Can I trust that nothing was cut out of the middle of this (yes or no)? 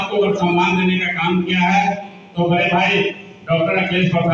yes